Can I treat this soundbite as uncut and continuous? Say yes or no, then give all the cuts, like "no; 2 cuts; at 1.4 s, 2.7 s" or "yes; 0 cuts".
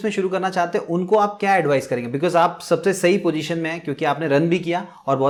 yes; 0 cuts